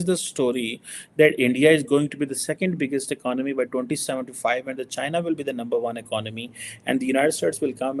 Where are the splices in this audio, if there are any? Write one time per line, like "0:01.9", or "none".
none